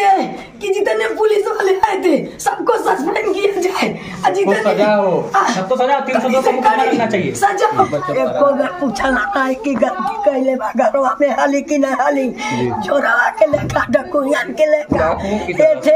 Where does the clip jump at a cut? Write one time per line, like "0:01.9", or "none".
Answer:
0:07.9